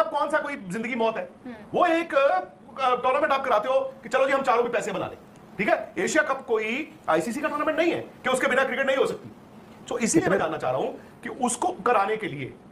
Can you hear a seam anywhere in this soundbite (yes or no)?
no